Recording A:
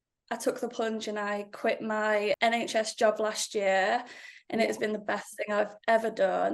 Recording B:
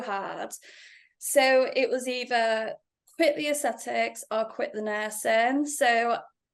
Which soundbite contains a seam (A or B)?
A